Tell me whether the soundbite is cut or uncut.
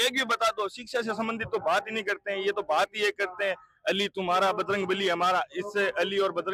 uncut